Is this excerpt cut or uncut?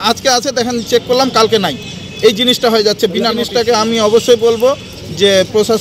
cut